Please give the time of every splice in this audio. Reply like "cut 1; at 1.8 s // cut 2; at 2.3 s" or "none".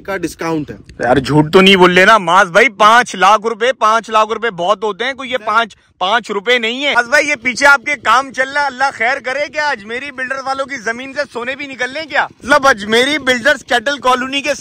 cut 1; at 6.9 s // cut 2; at 12.4 s